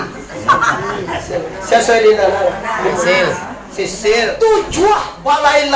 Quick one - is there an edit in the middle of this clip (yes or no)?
yes